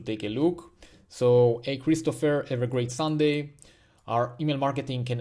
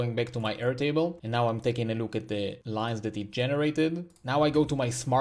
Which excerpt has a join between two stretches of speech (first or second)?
second